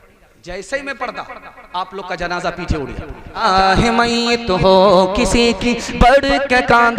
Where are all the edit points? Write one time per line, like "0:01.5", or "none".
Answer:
0:03.4